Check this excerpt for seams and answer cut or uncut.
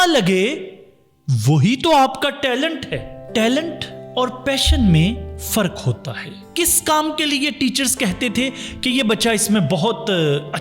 cut